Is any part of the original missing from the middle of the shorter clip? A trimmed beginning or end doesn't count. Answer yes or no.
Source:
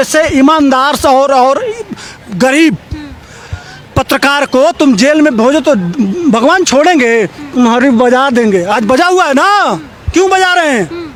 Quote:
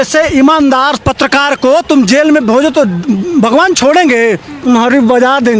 yes